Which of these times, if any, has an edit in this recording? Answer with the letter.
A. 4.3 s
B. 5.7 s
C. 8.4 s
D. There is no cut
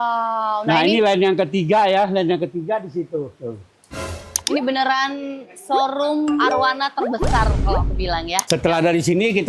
C